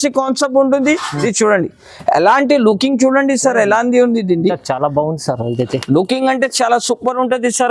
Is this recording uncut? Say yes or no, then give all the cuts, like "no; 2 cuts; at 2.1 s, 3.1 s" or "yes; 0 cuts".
no; 1 cut; at 1.2 s